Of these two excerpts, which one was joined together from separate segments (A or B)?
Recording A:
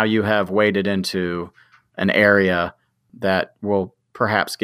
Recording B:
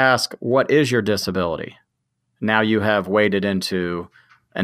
A